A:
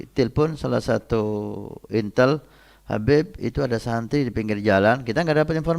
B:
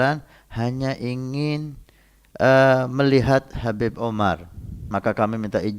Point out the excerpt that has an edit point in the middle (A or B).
B